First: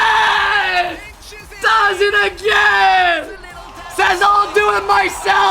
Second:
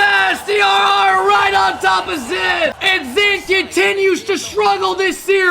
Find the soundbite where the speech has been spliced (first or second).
second